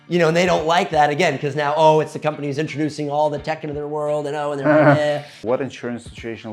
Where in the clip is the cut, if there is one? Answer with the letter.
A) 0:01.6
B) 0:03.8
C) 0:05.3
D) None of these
C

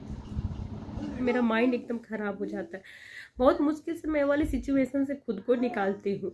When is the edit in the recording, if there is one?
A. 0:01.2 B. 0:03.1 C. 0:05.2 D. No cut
A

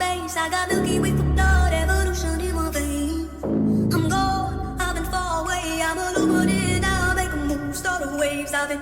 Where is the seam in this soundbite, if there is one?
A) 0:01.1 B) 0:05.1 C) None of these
C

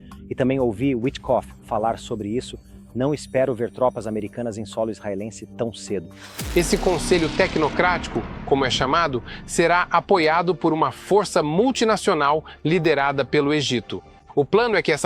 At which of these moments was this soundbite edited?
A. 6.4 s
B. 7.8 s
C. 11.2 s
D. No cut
A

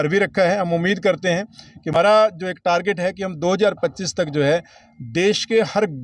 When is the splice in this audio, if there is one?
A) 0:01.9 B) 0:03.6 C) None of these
A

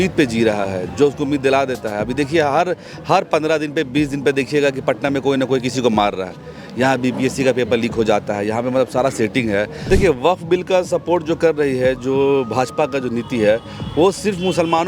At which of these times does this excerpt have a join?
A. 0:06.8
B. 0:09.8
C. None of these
B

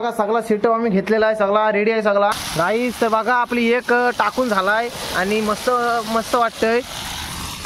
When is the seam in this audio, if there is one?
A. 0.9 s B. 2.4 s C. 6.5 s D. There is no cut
B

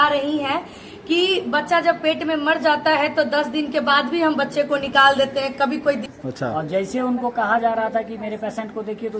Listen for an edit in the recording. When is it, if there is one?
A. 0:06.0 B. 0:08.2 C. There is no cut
A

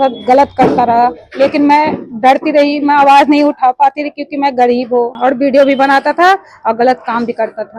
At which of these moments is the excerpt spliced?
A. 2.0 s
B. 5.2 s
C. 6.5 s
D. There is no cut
B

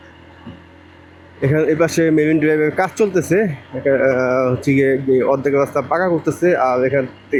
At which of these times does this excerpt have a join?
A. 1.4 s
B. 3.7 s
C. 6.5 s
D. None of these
D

